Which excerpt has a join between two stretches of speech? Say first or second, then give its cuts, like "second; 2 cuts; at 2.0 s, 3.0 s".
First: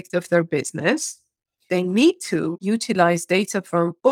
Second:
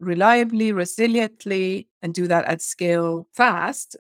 first; 1 cut; at 1.6 s